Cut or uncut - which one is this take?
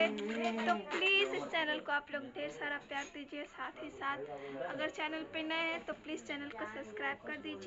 uncut